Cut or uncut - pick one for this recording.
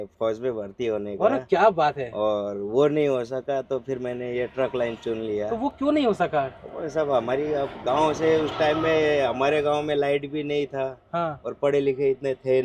uncut